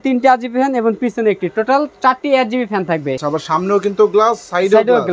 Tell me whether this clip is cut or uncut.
cut